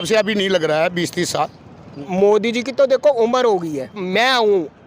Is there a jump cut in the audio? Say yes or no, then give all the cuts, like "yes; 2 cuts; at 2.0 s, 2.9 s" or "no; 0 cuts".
yes; 2 cuts; at 1.9 s, 4.0 s